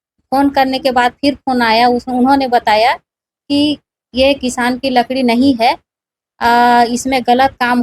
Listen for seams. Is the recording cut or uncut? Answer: uncut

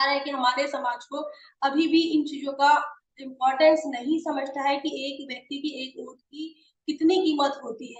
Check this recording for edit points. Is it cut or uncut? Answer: uncut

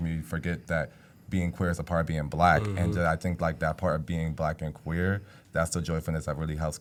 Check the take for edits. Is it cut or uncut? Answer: uncut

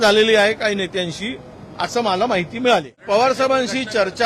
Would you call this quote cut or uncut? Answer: cut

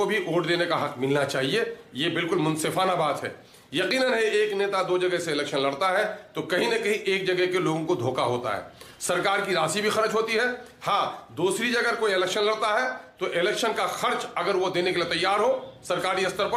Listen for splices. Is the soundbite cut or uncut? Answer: uncut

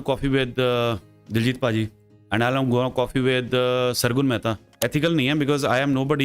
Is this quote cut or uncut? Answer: cut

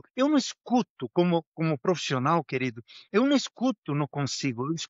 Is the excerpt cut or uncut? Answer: uncut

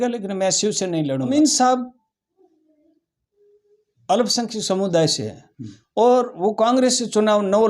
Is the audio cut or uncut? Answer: cut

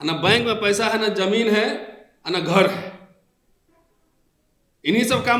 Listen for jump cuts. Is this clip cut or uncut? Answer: uncut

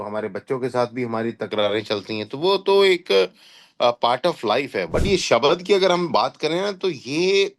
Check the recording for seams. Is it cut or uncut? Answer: cut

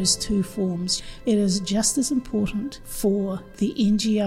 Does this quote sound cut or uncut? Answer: cut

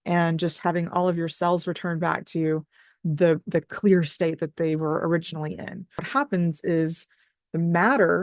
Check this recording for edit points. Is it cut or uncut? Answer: uncut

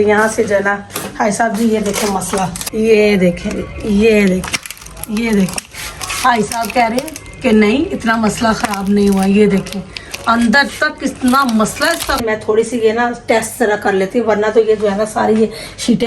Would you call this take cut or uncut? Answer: cut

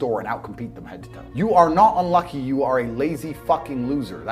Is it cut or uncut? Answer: cut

